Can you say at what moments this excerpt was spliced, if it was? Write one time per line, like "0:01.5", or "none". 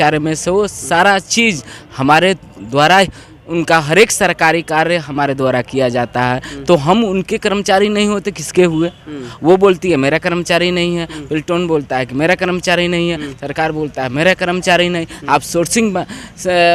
none